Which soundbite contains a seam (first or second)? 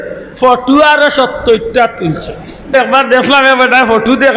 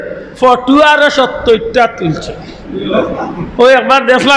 first